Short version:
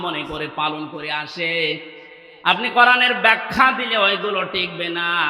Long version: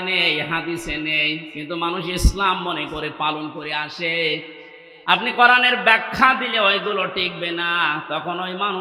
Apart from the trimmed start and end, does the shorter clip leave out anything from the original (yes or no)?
no